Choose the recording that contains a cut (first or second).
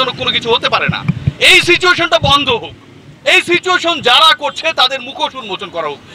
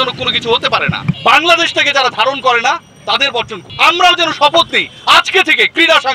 second